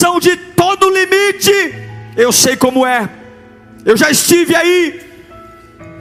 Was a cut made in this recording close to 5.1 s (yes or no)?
no